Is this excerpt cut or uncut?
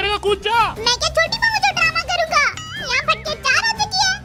uncut